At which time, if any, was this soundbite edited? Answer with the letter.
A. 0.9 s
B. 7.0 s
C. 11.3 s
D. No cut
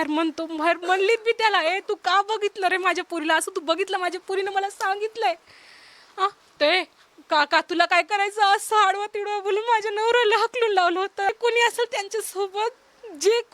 C